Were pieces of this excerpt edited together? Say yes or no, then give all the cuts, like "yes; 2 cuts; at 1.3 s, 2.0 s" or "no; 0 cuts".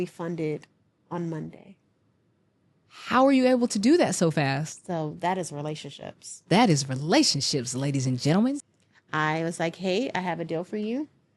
yes; 1 cut; at 8.6 s